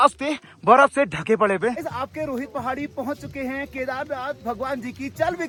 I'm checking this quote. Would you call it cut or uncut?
uncut